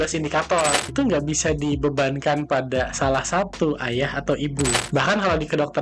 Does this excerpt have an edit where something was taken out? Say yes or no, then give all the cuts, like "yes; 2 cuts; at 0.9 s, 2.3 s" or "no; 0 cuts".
yes; 2 cuts; at 0.9 s, 4.8 s